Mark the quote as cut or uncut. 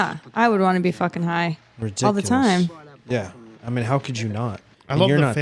uncut